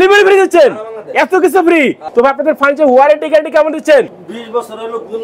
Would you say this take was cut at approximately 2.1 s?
yes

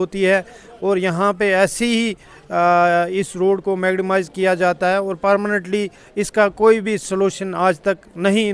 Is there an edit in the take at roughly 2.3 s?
no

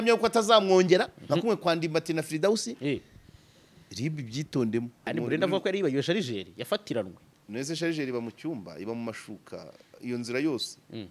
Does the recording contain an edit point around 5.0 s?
yes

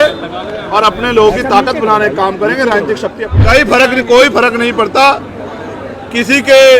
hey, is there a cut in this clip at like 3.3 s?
yes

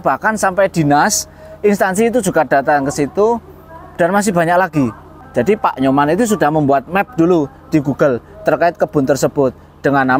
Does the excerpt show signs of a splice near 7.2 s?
no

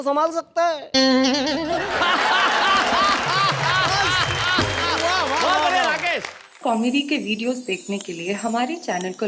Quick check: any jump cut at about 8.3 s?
no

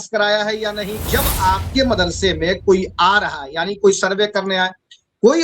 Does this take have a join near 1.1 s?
yes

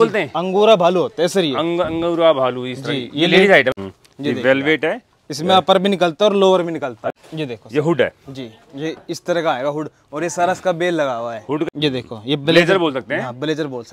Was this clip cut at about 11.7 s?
yes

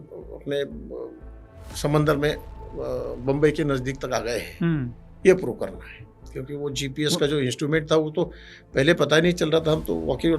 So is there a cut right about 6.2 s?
yes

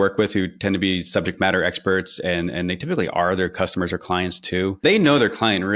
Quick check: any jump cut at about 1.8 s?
no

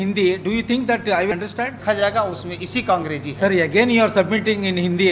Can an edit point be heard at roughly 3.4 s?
no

